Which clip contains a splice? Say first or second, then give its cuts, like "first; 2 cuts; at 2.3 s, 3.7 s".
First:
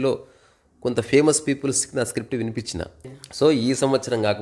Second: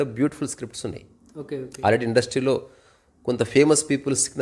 first; 1 cut; at 3.1 s